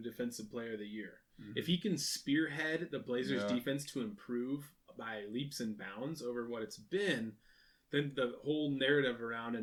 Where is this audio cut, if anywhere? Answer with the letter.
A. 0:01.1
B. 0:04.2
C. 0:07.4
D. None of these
D